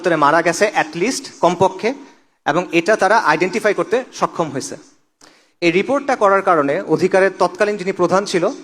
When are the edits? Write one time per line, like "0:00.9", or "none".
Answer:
none